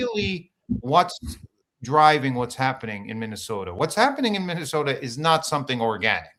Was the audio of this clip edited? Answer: no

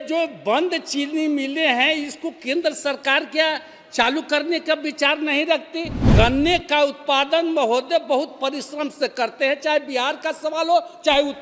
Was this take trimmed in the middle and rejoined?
yes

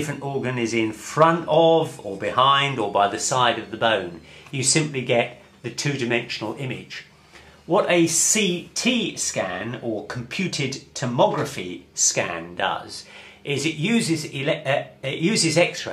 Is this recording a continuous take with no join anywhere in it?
yes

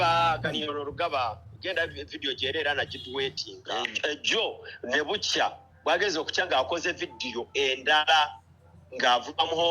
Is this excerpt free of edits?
no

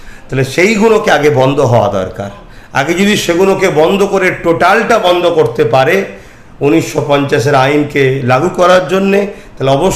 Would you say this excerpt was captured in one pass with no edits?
yes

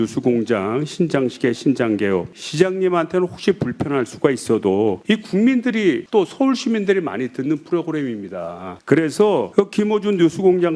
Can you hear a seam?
no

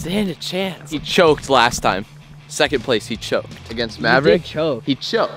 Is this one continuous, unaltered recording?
yes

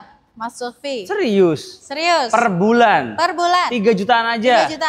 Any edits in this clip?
no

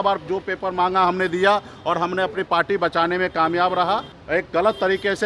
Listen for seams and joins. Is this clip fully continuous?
no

